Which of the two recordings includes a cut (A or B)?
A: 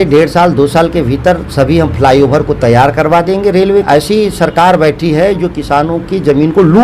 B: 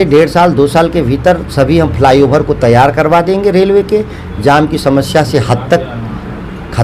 A